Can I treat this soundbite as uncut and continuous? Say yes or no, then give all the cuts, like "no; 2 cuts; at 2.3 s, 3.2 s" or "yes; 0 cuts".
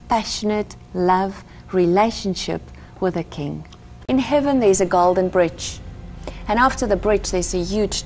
no; 1 cut; at 3.9 s